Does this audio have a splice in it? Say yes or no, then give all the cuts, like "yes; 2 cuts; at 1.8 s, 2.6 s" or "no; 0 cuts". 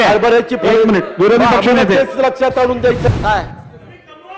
yes; 1 cut; at 3.1 s